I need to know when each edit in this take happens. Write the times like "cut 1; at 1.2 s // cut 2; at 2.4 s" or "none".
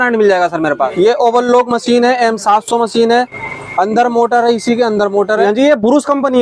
cut 1; at 0.9 s // cut 2; at 5.4 s